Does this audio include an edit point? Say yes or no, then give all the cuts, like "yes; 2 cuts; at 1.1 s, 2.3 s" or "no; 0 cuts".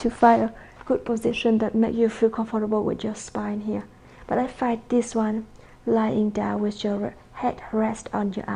no; 0 cuts